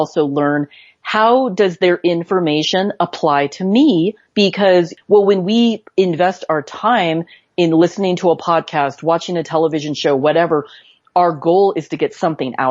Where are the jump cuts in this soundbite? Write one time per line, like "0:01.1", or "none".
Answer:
0:05.0